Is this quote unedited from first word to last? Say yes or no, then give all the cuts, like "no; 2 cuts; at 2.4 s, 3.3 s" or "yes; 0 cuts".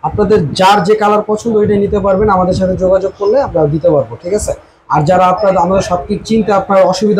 yes; 0 cuts